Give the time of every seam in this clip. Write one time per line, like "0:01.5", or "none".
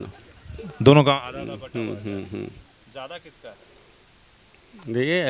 none